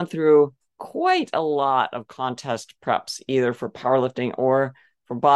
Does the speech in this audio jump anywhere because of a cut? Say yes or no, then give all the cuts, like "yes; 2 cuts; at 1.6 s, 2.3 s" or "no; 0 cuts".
no; 0 cuts